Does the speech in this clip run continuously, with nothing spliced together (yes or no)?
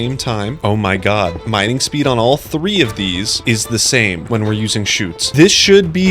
no